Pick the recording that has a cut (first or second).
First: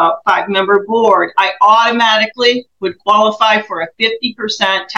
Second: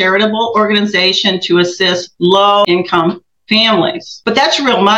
second